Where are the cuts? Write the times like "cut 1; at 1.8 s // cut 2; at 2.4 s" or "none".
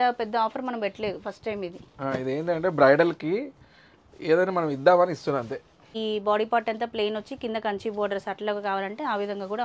cut 1; at 5.9 s